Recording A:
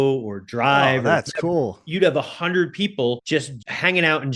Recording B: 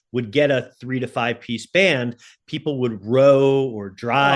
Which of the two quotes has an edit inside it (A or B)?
A